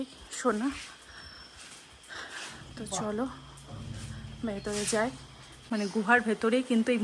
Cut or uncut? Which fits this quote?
cut